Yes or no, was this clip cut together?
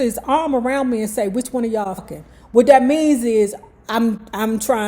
yes